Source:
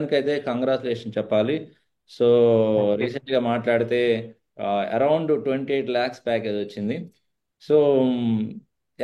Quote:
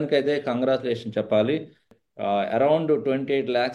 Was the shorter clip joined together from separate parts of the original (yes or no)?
yes